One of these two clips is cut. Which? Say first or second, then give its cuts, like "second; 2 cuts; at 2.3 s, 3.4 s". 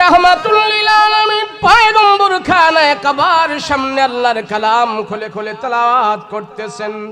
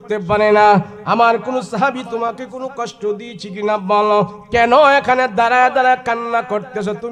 first; 1 cut; at 1.5 s